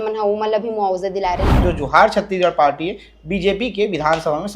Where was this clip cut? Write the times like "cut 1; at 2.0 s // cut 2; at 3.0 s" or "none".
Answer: cut 1; at 1.5 s